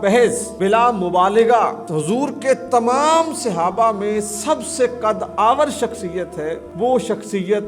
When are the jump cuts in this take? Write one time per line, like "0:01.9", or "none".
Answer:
none